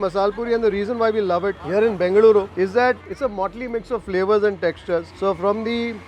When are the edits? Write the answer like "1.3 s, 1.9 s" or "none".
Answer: 1.6 s, 2.9 s